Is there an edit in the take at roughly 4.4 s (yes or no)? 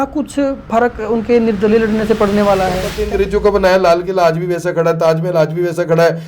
no